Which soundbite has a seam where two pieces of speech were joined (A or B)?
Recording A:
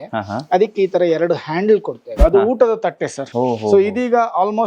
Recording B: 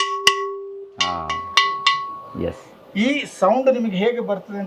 A